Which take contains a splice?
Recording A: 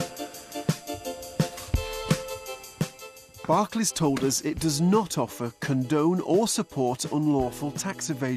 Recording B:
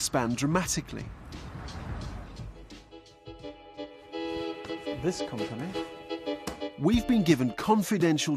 A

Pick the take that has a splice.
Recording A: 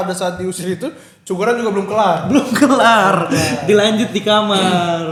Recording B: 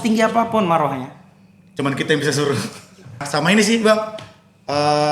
B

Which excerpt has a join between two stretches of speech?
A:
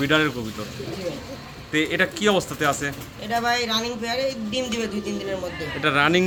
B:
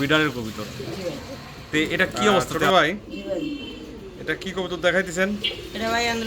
B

